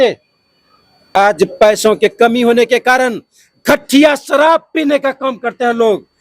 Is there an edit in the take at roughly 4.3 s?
no; 1 cut; at 1.1 s

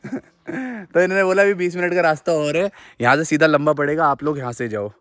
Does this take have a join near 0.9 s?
no; 0 cuts

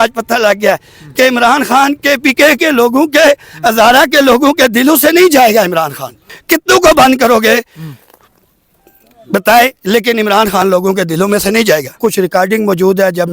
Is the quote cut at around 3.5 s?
no; 2 cuts; at 6.1 s, 12.0 s

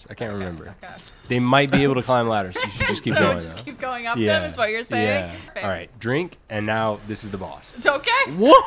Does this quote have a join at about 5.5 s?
yes; 1 cut; at 5.5 s

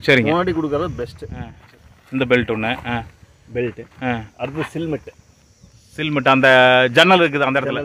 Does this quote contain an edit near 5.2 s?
no; 1 cut; at 1.6 s

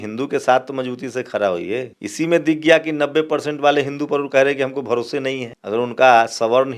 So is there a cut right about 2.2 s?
no; 0 cuts

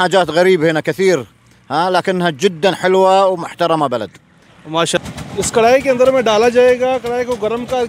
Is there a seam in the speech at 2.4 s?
no; 1 cut; at 5.0 s

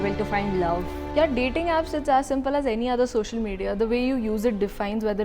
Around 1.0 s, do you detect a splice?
yes; 1 cut; at 1.0 s

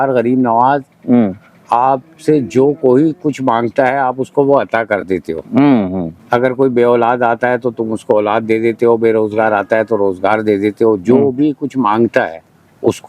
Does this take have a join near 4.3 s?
no; 1 cut; at 6.1 s

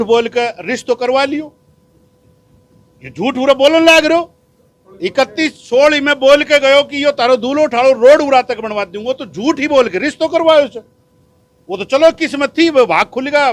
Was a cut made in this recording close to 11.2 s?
no; 0 cuts

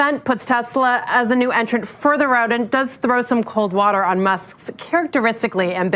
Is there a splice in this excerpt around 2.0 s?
no; 0 cuts

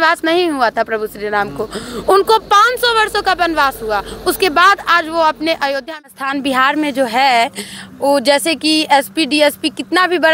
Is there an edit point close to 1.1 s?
no; 1 cut; at 6.1 s

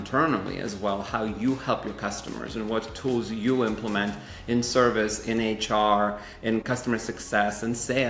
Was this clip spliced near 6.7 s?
yes; 1 cut; at 6.7 s

